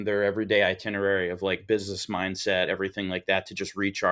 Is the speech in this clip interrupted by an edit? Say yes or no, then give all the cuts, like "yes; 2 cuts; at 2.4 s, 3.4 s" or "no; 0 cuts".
no; 0 cuts